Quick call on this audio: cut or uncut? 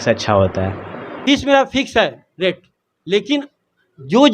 cut